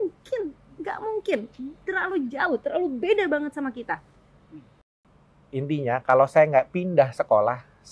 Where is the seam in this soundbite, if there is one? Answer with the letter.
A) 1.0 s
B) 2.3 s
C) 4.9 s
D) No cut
C